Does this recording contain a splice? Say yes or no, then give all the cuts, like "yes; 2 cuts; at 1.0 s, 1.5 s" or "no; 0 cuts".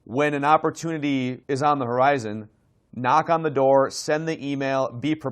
yes; 1 cut; at 1.4 s